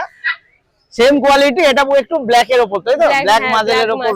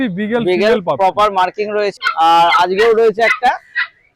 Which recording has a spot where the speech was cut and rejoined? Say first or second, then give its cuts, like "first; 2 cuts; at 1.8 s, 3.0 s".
second; 1 cut; at 2.0 s